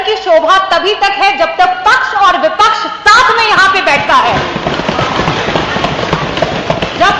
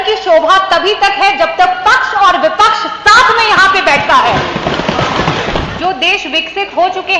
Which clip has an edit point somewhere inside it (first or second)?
second